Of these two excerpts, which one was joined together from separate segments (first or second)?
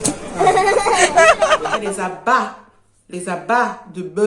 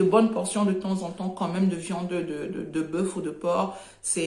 first